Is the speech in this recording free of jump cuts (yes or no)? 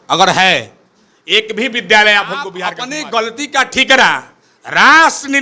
no